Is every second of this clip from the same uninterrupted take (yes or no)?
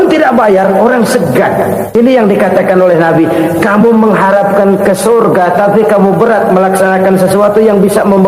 no